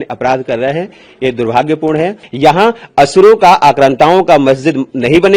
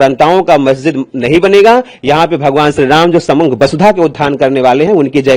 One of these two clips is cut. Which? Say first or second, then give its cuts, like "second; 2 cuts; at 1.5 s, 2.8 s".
first; 1 cut; at 2.2 s